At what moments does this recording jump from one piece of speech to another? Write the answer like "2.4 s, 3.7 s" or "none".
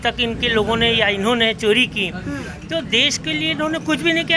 none